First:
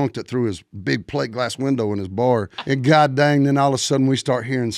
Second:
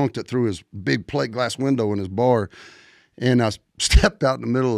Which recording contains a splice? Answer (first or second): first